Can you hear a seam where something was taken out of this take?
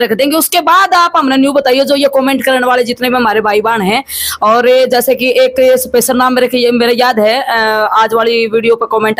no; 0 cuts

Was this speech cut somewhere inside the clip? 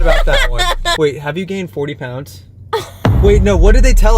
yes; 1 cut; at 1.0 s

